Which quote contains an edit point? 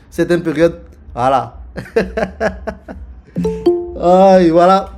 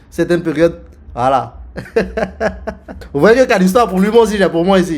second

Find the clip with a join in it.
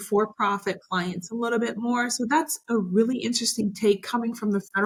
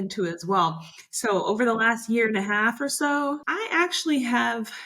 second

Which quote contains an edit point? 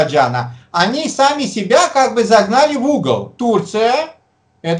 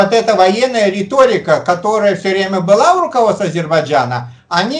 first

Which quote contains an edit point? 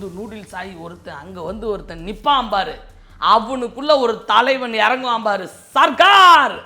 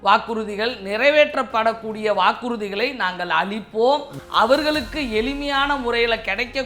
second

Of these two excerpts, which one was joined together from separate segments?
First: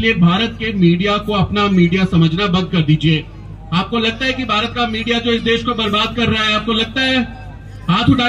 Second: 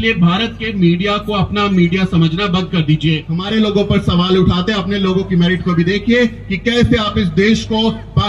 second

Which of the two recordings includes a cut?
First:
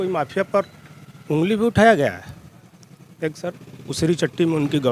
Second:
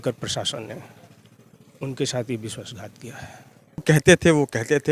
second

